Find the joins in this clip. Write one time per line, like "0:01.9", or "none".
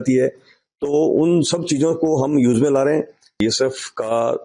0:03.4